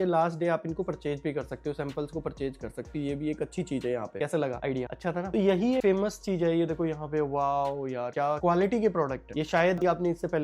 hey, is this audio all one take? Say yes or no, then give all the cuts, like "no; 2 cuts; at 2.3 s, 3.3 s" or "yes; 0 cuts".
yes; 0 cuts